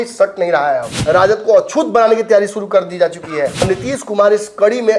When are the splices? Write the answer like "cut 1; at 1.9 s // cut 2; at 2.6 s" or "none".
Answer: cut 1; at 0.9 s // cut 2; at 3.6 s